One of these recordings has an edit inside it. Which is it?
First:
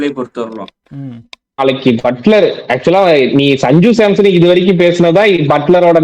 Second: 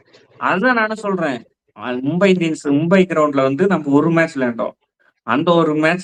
first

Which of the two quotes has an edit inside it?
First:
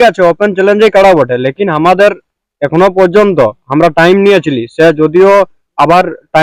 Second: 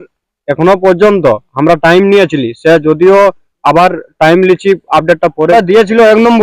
second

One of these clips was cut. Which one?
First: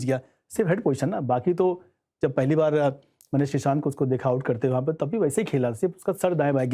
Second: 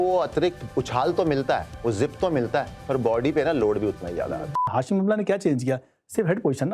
second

